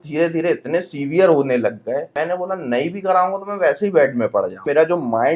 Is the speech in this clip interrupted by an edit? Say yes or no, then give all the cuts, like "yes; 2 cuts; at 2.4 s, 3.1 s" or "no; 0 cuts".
yes; 2 cuts; at 2.1 s, 4.6 s